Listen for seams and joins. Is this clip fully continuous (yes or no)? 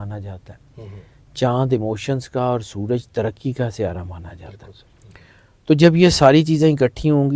yes